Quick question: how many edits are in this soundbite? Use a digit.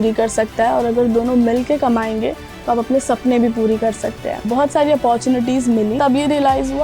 2